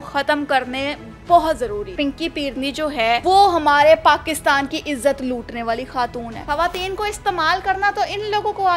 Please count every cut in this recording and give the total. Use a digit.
3